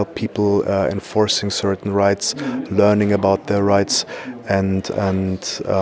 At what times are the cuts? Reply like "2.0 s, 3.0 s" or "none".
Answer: none